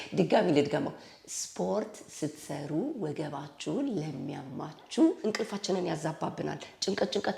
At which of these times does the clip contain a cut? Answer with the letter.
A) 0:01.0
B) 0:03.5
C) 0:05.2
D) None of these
C